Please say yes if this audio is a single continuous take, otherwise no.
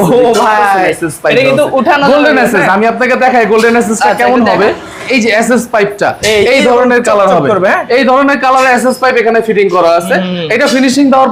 yes